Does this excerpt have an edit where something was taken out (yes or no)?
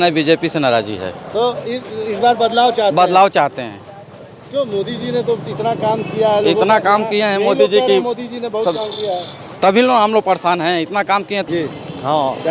no